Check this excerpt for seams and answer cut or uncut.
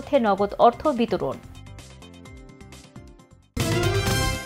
cut